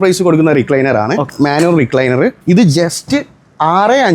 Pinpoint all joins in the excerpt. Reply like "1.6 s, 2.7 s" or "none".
1.3 s, 2.4 s